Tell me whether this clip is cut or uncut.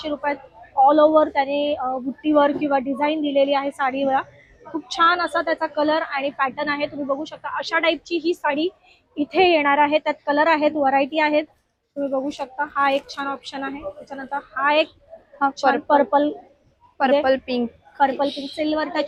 uncut